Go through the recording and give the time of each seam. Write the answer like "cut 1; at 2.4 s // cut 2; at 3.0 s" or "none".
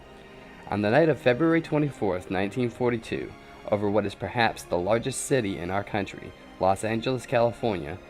cut 1; at 6.9 s